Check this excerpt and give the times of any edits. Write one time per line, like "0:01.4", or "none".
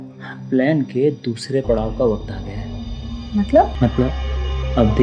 0:03.7